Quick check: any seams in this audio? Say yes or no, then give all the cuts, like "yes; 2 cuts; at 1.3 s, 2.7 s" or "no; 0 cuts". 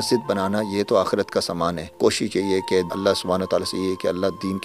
yes; 2 cuts; at 1.9 s, 2.9 s